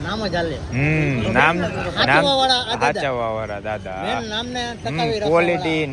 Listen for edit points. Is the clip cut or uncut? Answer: uncut